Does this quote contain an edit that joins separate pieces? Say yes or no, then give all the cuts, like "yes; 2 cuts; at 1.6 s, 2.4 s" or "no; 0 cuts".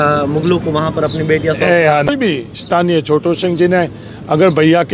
yes; 1 cut; at 2.1 s